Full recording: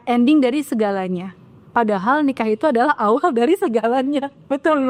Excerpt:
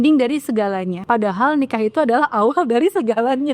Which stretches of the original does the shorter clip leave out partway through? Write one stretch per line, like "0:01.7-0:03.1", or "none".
0:01.2-0:01.6